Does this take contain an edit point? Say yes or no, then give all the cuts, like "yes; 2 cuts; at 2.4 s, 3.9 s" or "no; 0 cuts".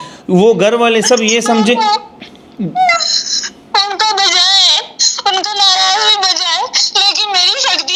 no; 0 cuts